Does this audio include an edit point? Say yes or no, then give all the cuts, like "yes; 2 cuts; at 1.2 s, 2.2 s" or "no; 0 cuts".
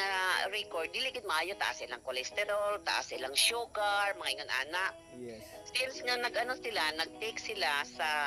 no; 0 cuts